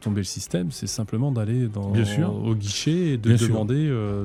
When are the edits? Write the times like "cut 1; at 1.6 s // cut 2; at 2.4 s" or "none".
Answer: none